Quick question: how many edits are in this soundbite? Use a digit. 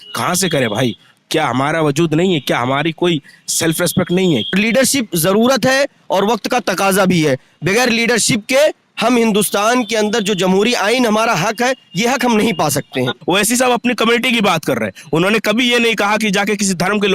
2